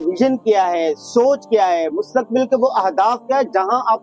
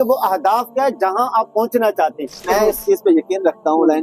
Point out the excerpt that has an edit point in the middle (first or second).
second